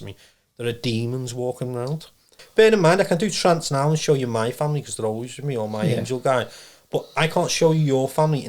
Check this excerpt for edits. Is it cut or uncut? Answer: cut